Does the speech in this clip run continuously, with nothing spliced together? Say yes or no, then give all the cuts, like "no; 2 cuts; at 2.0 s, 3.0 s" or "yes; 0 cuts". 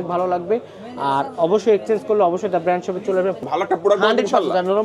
no; 1 cut; at 3.4 s